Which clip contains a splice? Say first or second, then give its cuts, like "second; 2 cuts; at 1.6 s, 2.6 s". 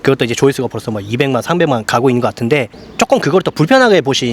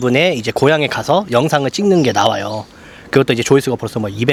first; 1 cut; at 2.8 s